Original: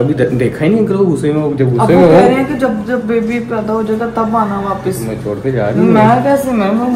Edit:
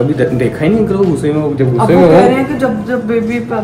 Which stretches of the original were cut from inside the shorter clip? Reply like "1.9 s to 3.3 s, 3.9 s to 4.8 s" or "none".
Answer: none

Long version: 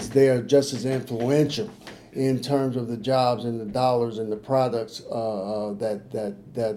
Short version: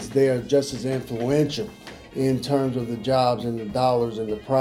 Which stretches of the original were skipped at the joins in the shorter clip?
none

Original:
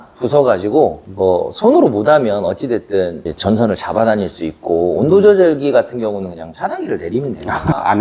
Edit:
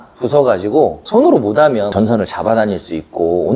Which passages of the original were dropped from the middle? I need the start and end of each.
1.0 s to 1.5 s, 2.4 s to 3.4 s

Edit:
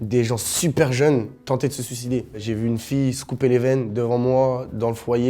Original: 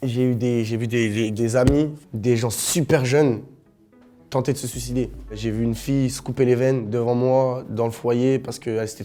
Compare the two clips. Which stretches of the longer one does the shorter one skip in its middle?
3.5 s to 4.2 s, 5.2 s to 5.3 s

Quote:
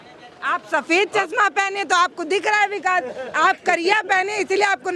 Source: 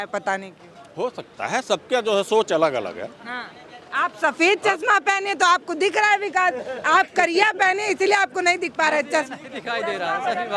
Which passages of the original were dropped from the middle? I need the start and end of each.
none

